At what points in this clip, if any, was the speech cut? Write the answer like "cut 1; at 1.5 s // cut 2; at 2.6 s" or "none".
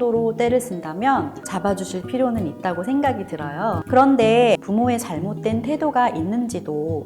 cut 1; at 1.4 s // cut 2; at 3.8 s // cut 3; at 4.6 s